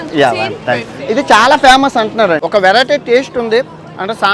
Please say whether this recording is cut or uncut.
cut